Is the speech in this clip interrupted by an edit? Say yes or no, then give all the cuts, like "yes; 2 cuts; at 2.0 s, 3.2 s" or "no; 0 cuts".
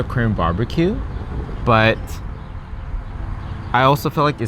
no; 0 cuts